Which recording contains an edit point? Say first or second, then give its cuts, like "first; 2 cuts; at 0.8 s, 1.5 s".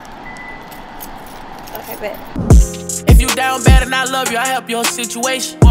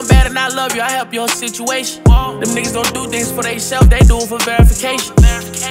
first; 1 cut; at 2.3 s